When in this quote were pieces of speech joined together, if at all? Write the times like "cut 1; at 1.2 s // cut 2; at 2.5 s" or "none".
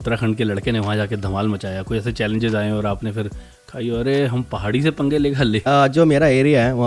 none